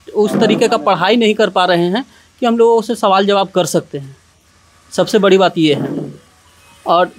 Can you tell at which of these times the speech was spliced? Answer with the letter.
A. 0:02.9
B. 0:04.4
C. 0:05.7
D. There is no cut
D